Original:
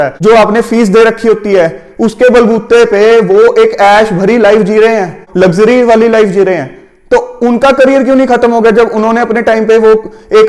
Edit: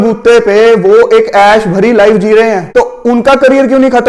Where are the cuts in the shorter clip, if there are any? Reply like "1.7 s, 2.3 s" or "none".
2.6 s